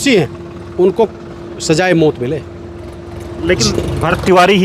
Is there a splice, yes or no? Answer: no